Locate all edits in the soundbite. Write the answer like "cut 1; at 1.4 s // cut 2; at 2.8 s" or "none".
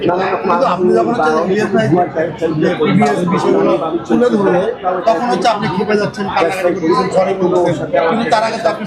none